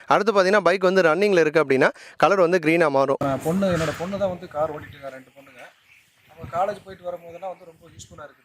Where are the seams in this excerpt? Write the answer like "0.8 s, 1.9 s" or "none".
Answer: 3.2 s